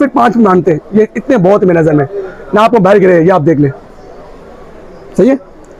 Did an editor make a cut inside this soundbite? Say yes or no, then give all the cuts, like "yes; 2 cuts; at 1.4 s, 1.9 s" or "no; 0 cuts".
no; 0 cuts